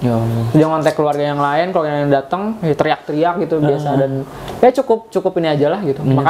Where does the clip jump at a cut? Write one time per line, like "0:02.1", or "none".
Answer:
none